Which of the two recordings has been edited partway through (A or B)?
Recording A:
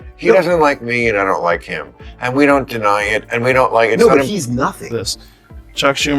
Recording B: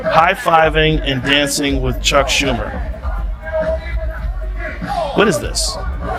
A